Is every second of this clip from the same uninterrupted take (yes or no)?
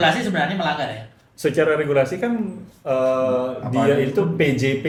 yes